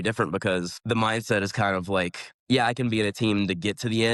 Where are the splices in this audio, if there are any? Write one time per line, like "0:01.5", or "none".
none